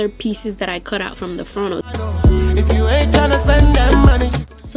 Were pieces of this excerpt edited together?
no; 0 cuts

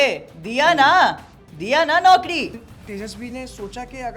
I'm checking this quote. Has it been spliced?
yes; 1 cut; at 2.6 s

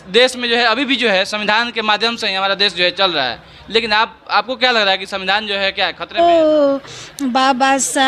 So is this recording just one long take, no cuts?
no; 1 cut; at 6.2 s

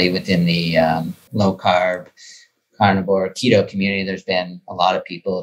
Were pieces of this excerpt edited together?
yes; 1 cut; at 1.2 s

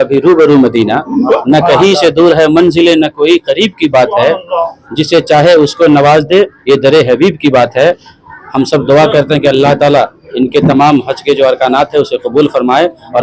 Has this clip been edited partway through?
no; 0 cuts

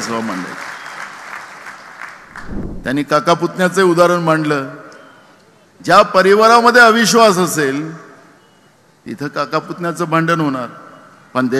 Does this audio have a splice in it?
yes; 1 cut; at 2.7 s

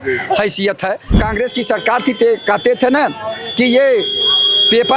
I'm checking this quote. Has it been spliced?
yes; 1 cut; at 1.2 s

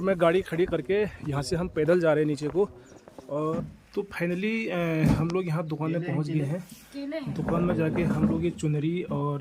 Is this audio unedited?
no; 1 cut; at 3.5 s

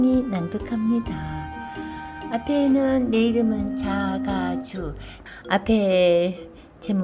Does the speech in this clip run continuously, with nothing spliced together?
no; 1 cut; at 5.1 s

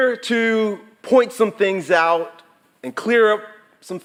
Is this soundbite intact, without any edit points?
yes; 0 cuts

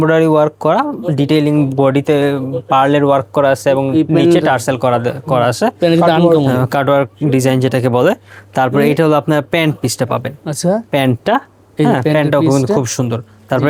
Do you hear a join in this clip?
no; 0 cuts

